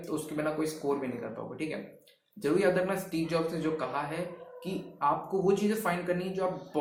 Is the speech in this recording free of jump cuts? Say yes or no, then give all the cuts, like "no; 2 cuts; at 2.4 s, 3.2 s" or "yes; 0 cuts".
yes; 0 cuts